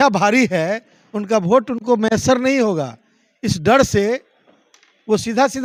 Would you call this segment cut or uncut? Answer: uncut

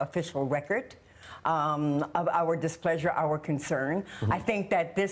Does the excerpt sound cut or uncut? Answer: cut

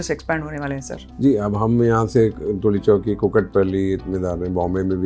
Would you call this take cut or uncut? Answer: uncut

